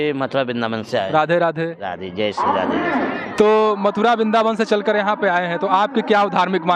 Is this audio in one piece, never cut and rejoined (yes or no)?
yes